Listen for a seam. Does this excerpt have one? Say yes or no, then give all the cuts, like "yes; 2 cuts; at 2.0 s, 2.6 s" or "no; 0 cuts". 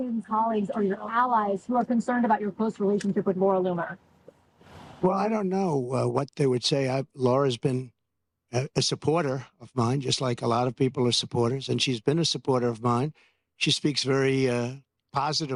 no; 0 cuts